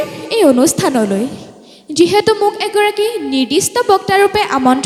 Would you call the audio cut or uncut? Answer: uncut